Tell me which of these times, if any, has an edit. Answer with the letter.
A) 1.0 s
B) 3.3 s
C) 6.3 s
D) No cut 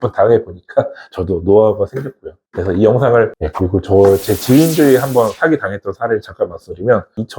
B